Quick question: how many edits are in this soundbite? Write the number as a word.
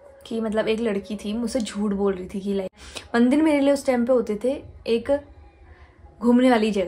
one